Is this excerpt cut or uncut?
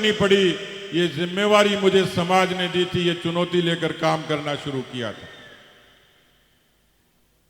uncut